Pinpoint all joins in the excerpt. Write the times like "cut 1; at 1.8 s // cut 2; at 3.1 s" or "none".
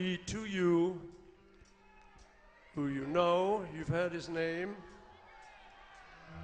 none